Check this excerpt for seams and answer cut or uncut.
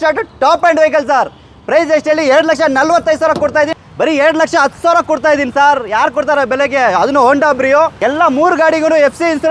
cut